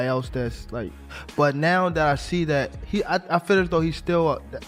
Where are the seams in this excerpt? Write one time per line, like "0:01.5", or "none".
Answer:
none